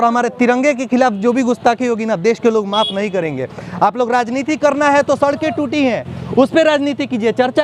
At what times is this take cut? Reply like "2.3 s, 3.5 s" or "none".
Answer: none

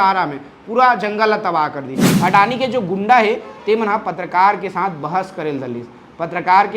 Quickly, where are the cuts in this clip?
2.0 s

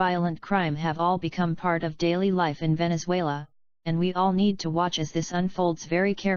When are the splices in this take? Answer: 4.6 s

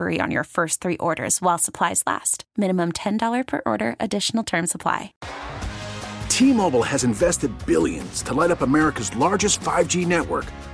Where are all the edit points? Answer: 5.2 s

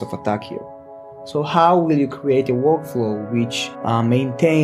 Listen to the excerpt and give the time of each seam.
3.7 s

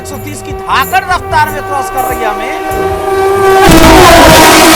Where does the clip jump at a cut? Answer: none

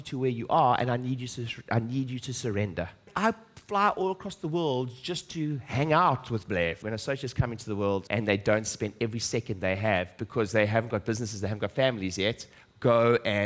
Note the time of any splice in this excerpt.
3.1 s, 6.8 s, 8.1 s

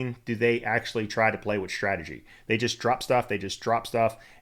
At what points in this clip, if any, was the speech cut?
none

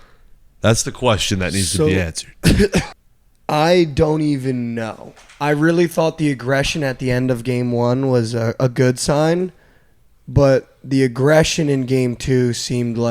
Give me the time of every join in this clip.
2.9 s

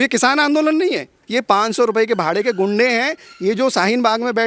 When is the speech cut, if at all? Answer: 1.1 s

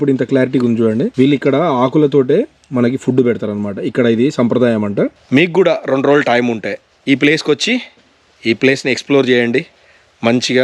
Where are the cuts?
1.1 s, 5.2 s

